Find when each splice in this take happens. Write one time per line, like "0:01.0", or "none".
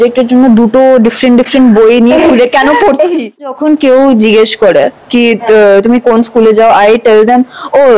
0:03.4